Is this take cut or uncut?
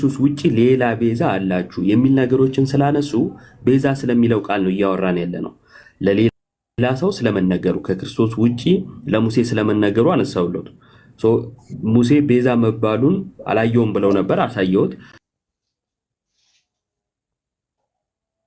uncut